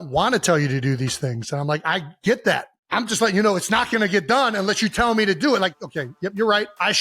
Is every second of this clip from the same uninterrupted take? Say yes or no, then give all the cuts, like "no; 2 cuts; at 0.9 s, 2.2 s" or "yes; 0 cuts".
no; 1 cut; at 5.9 s